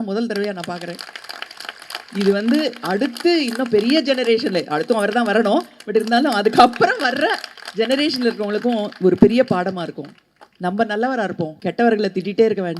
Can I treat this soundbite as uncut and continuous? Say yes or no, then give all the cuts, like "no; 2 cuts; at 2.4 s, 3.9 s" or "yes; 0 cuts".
no; 1 cut; at 11.5 s